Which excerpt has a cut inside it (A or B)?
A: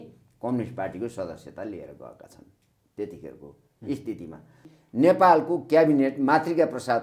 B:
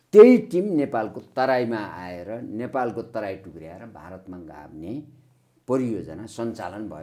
A